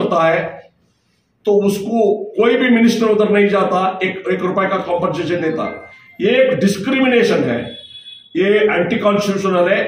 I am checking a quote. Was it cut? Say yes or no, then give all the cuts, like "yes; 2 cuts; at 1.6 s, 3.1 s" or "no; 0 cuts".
no; 0 cuts